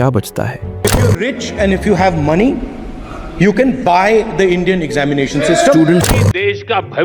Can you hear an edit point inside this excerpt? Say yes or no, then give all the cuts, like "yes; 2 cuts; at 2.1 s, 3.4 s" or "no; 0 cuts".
yes; 2 cuts; at 1.0 s, 6.0 s